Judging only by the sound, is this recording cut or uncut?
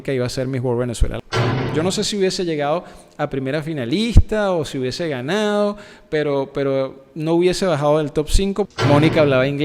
cut